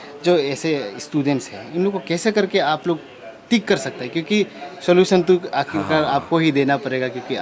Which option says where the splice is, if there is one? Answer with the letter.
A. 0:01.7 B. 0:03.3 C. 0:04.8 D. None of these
D